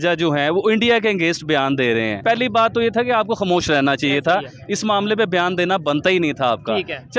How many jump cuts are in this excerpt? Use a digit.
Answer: 1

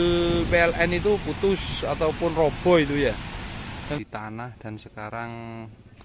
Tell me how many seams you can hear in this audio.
1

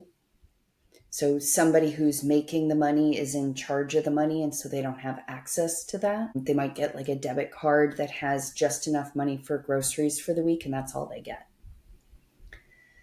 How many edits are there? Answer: 1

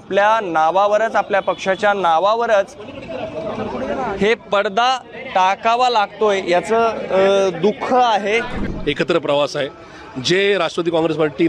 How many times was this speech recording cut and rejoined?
1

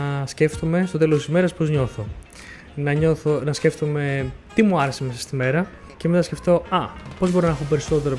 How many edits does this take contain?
1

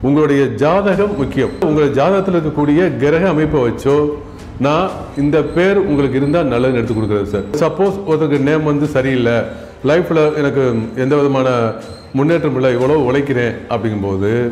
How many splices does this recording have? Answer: 2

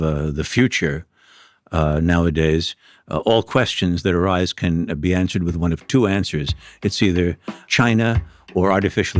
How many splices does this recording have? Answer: 1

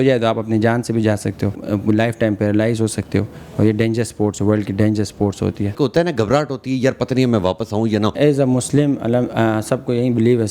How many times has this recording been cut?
3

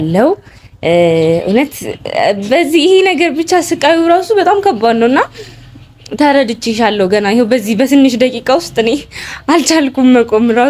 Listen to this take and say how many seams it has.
0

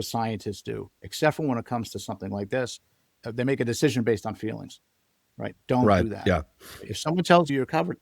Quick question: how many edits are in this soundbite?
1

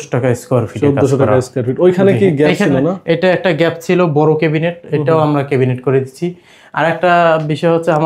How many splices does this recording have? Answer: 0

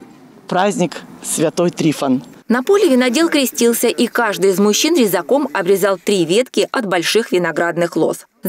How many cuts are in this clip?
1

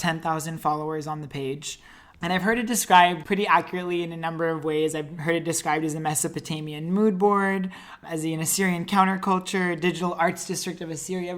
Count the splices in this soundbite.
2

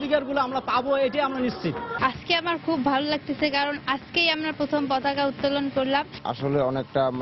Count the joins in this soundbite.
2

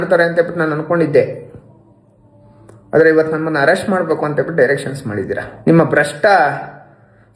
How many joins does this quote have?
1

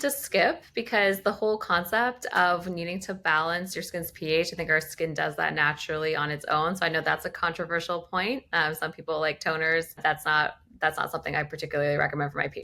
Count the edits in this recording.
0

